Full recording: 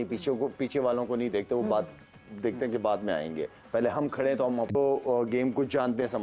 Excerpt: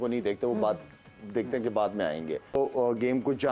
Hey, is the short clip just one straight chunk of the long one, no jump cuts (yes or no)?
no